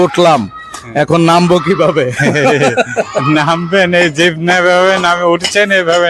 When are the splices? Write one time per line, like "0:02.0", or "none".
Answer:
none